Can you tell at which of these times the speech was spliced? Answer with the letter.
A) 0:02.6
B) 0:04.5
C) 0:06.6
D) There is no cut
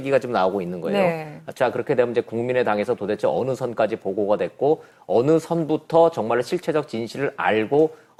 D